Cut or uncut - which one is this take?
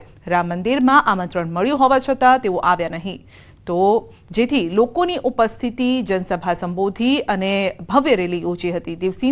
cut